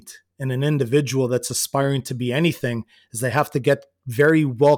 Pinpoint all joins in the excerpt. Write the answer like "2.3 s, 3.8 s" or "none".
none

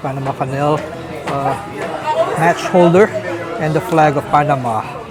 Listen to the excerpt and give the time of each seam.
none

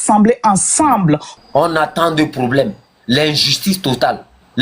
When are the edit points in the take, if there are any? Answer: 1.3 s

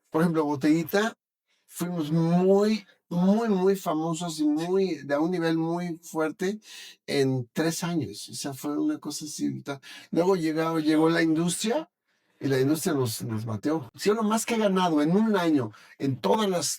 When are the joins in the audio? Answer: 13.9 s

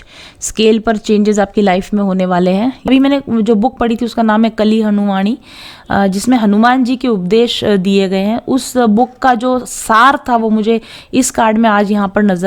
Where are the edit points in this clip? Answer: 2.8 s

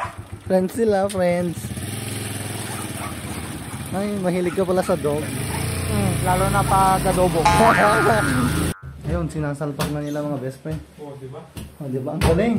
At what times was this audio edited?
8.6 s

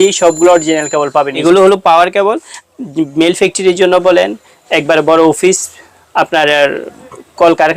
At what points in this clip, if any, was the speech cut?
1.3 s

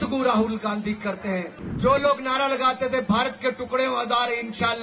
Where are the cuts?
1.6 s

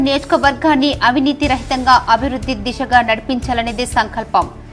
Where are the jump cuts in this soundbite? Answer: none

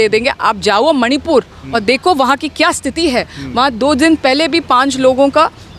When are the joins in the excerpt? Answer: none

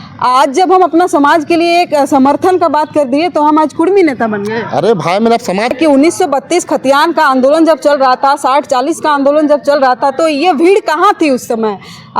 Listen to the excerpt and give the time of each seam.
5.7 s

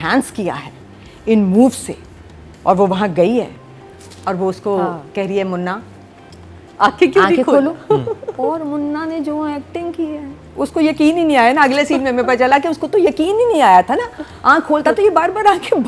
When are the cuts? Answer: none

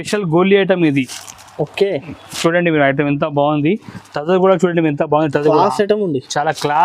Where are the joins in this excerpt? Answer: none

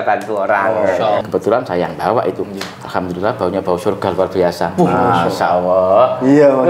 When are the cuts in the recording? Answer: 1.2 s

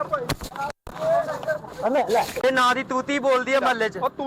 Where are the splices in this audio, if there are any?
2.4 s

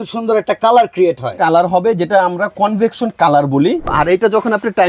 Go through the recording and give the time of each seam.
3.9 s

